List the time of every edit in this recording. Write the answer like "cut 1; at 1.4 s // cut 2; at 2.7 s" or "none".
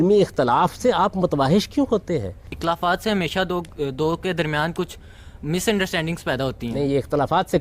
cut 1; at 2.5 s